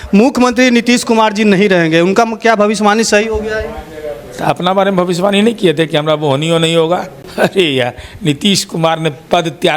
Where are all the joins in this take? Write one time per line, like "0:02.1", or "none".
0:07.2